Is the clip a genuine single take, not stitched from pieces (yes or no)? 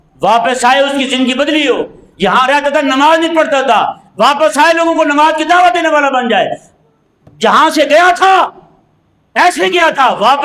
yes